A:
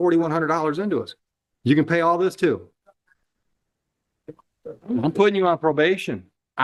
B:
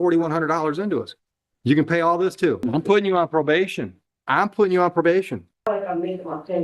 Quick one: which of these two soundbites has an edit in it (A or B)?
B